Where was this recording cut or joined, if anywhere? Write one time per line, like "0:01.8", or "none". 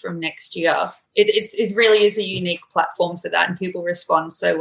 0:01.0